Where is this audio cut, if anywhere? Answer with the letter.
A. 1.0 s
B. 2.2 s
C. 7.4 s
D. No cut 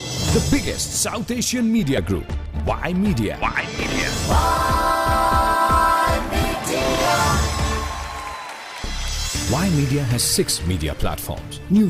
B